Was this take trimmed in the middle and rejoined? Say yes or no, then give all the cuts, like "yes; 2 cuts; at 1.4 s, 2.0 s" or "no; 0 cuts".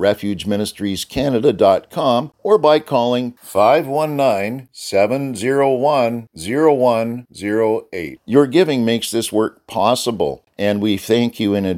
yes; 2 cuts; at 2.3 s, 10.4 s